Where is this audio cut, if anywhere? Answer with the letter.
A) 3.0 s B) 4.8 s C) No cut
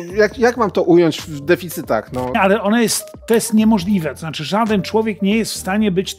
C